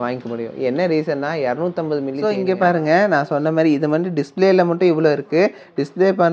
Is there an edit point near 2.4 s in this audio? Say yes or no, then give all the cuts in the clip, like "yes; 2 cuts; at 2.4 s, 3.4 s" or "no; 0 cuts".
yes; 1 cut; at 2.4 s